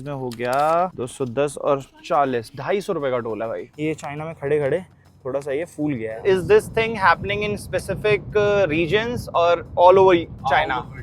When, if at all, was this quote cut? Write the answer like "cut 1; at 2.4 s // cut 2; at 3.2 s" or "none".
cut 1; at 3.7 s // cut 2; at 6.2 s